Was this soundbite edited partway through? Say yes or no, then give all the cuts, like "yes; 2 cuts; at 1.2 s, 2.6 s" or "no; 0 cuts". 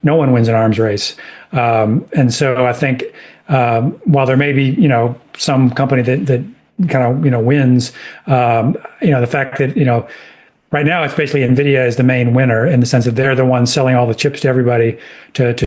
no; 0 cuts